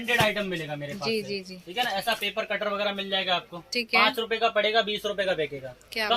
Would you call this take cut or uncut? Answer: uncut